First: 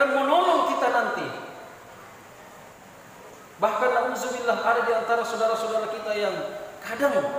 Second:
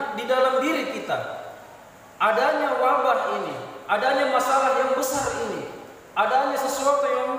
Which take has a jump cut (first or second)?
first